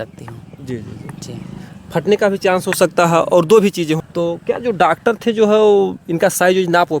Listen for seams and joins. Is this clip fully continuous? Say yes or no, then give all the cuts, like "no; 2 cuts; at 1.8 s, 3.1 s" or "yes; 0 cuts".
no; 1 cut; at 4.0 s